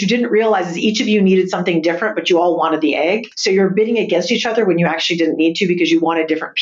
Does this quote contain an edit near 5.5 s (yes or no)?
no